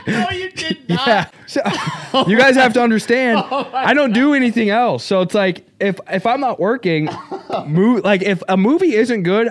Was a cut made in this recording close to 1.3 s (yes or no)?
yes